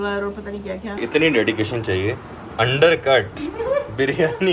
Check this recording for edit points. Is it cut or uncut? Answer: cut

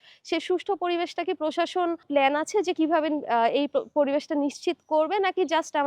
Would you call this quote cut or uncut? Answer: cut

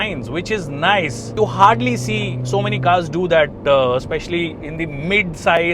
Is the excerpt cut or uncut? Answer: cut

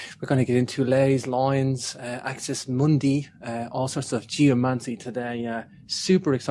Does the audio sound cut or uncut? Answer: uncut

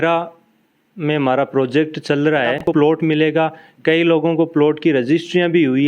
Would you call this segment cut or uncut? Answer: cut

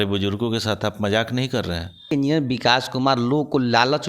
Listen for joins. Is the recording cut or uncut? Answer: cut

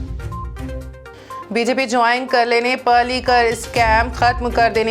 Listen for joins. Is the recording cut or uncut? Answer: uncut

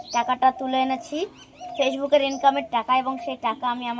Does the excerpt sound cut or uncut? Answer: uncut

